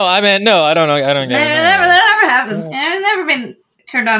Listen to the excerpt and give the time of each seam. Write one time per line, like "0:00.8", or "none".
0:02.7